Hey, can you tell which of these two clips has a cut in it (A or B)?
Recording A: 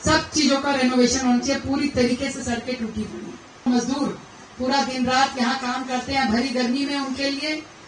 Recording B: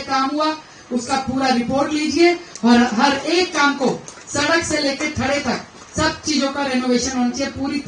A